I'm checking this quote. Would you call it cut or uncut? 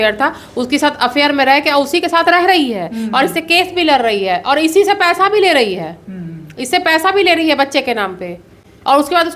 uncut